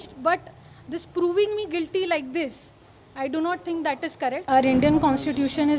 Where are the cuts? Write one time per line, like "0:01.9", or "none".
0:04.5